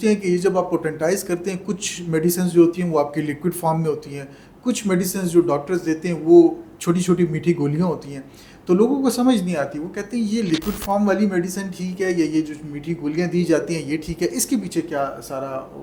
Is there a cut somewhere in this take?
no; 0 cuts

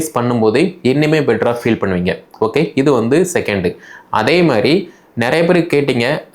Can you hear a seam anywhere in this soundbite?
no; 0 cuts

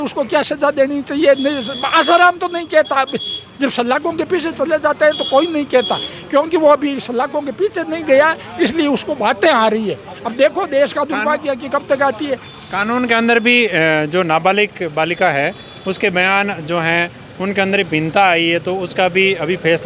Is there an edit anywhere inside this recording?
no; 0 cuts

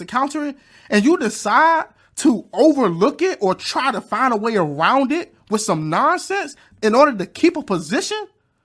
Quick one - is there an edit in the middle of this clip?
no; 0 cuts

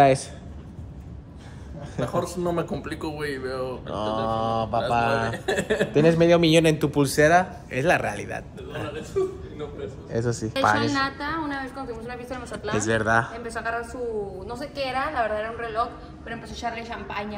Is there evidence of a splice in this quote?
yes; 1 cut; at 10.5 s

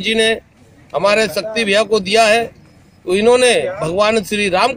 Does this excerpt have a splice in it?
no; 0 cuts

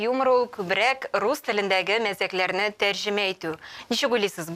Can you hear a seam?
no; 0 cuts

